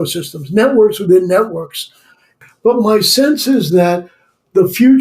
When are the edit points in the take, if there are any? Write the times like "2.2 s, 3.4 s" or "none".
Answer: 2.3 s